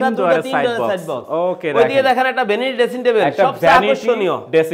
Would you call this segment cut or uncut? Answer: uncut